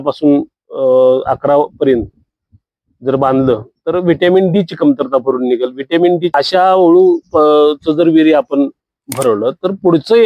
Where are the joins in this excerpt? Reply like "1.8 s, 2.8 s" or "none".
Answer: 6.3 s

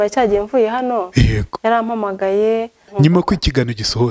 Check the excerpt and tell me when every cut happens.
2.9 s

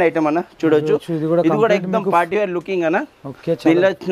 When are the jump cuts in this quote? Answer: none

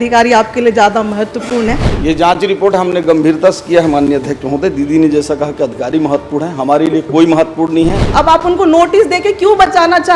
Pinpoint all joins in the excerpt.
1.9 s, 8.0 s

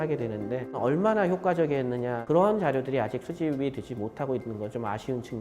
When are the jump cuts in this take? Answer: 0.8 s, 2.2 s

